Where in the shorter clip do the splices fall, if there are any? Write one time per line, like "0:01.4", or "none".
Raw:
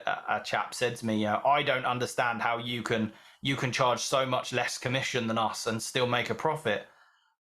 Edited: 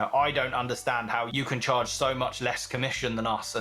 0:01.3